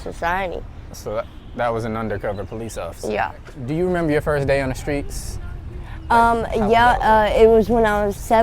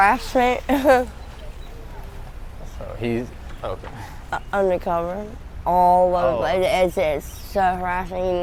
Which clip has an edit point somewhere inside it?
first; 1 cut; at 3.6 s

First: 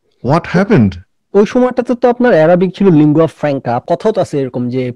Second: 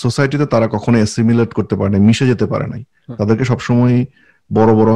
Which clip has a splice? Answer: first; 1 cut; at 3.8 s

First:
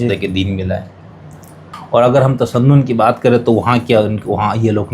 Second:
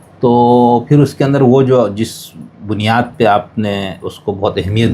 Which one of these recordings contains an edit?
first; 1 cut; at 1.6 s

